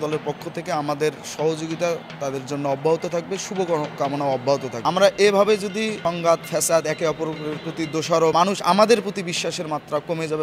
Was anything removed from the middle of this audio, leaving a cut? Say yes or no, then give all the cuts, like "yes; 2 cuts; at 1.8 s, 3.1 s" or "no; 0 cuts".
yes; 3 cuts; at 4.7 s, 6.0 s, 8.3 s